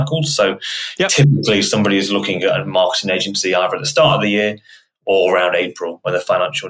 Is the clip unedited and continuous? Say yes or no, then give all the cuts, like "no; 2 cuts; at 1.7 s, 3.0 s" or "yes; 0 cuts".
yes; 0 cuts